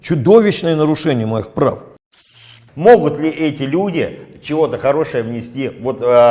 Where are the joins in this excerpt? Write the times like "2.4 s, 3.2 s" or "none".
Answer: 2.4 s